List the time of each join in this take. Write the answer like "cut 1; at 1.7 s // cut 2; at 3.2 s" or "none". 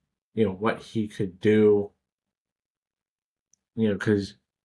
none